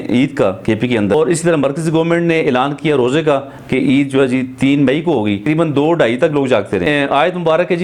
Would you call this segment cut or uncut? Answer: cut